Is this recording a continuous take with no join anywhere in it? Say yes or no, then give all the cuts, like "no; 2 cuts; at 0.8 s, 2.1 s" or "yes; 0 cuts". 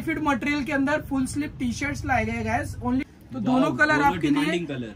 no; 1 cut; at 3.1 s